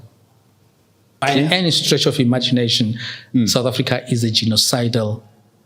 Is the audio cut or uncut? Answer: cut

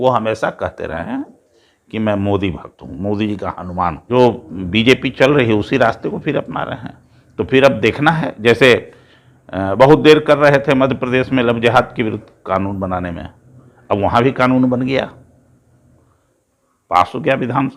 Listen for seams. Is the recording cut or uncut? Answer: cut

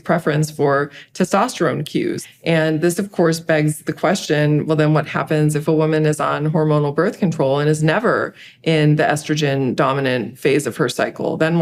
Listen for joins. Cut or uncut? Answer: cut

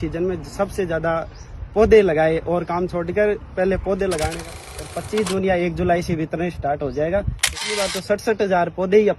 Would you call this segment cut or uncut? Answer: cut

